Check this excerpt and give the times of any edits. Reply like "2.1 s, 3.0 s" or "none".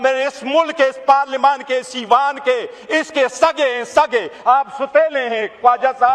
none